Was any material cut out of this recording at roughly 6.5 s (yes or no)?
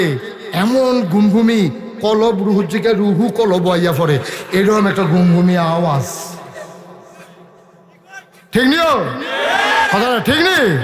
no